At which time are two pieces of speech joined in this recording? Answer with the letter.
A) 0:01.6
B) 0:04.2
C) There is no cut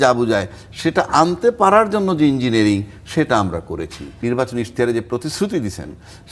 B